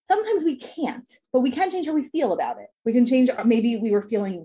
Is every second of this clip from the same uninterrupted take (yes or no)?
yes